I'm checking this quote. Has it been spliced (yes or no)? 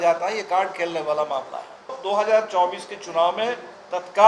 yes